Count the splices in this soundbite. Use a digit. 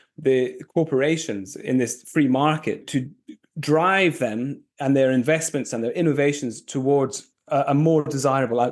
1